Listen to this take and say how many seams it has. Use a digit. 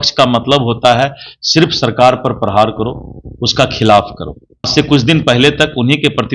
1